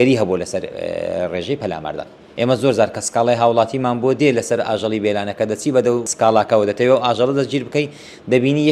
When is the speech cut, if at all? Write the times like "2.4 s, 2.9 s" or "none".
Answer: 2.2 s, 6.1 s